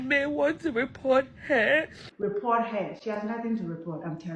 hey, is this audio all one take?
no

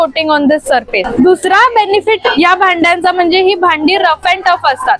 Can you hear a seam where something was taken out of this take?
yes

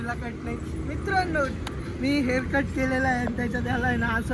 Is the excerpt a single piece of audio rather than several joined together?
yes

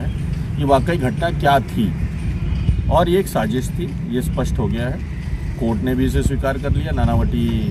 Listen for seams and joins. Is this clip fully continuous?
yes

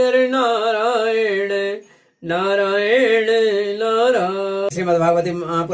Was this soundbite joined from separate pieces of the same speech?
yes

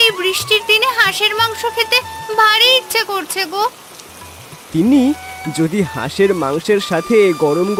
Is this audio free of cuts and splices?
yes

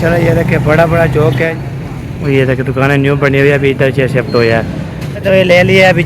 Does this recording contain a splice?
yes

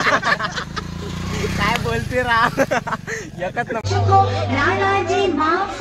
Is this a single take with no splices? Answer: yes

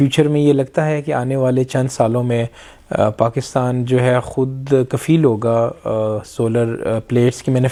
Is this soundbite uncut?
yes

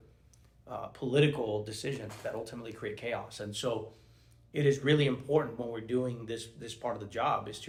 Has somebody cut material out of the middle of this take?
no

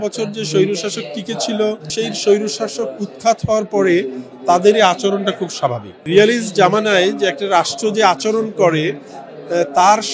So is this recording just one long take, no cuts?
no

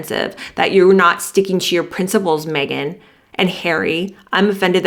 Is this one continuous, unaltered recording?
yes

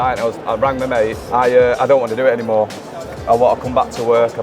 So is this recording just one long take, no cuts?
no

